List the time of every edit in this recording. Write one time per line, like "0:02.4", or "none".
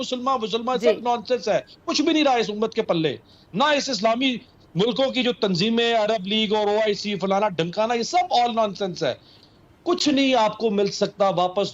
0:09.3